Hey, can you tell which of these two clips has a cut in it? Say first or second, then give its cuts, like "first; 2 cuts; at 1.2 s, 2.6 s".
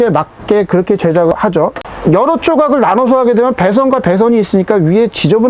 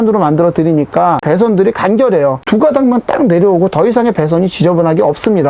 second; 2 cuts; at 1.2 s, 2.4 s